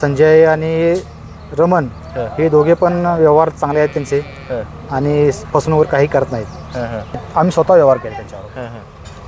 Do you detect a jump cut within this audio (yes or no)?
yes